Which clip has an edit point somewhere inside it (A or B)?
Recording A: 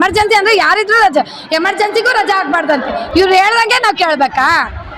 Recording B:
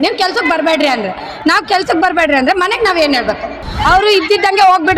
B